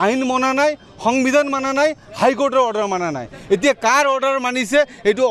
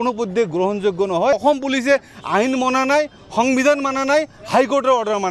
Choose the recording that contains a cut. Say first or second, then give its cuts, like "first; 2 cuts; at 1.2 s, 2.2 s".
second; 1 cut; at 1.4 s